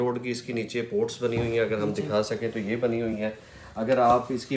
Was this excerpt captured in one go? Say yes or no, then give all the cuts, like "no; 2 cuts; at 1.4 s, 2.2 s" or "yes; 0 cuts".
yes; 0 cuts